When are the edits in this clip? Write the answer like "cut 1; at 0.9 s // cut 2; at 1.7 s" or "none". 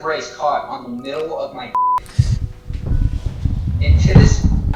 none